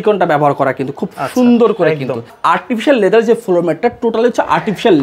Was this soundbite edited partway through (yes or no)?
yes